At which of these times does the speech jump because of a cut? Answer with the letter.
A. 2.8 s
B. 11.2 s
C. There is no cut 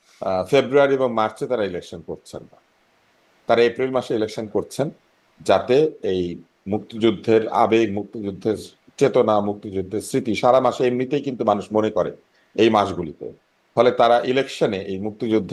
C